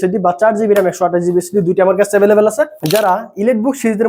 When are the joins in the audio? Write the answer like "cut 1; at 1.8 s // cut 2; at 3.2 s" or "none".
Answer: cut 1; at 2.8 s